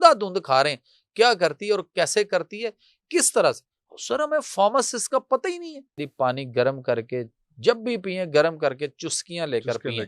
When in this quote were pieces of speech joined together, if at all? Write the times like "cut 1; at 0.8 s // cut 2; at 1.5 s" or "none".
cut 1; at 6.0 s